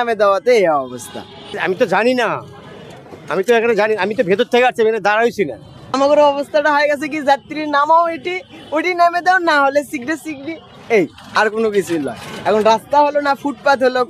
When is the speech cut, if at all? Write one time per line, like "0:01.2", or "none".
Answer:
0:01.6
0:05.9